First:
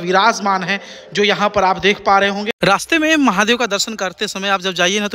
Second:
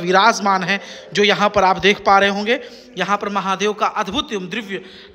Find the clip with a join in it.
first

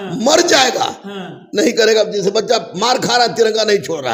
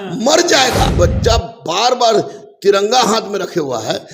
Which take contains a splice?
second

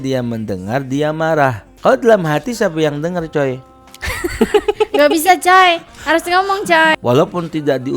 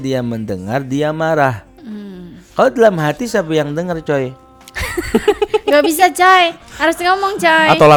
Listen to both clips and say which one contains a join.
first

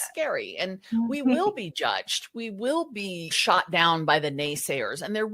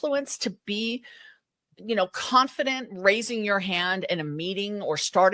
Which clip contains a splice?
first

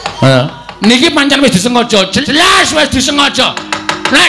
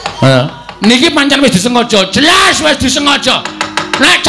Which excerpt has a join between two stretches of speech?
second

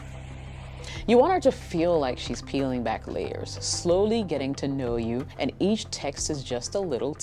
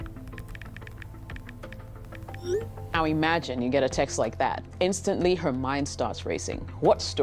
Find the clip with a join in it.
second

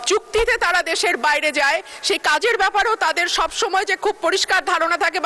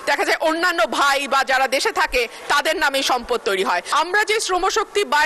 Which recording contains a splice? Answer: second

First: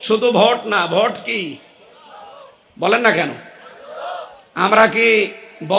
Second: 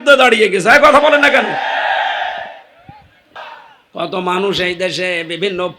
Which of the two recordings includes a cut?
second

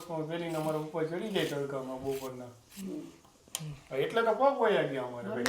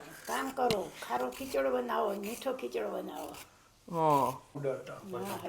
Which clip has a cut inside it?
second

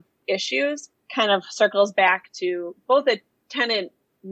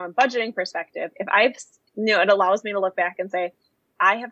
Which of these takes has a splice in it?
first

